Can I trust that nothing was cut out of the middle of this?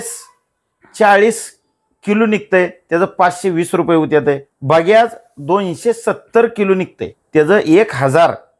no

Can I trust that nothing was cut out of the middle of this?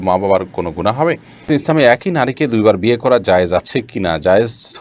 no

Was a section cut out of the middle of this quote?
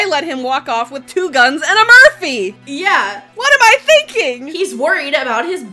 yes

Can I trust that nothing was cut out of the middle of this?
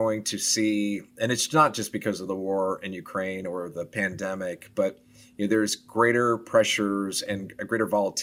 yes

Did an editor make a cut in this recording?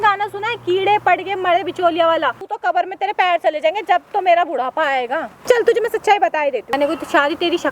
yes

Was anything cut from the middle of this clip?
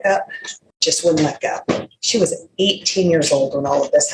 no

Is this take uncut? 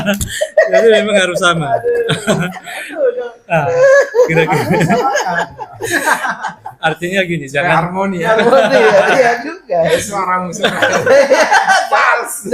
yes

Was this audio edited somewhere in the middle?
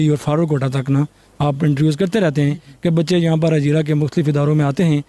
no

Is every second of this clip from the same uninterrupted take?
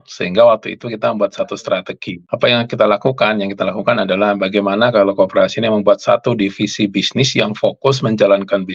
yes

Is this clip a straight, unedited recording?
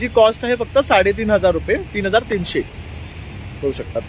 yes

